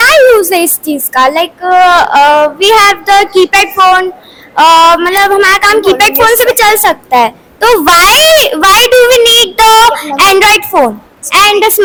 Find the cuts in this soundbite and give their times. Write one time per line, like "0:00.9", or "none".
none